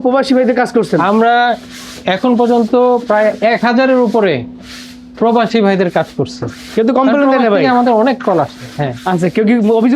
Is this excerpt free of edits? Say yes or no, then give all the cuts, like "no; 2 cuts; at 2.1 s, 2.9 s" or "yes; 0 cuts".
yes; 0 cuts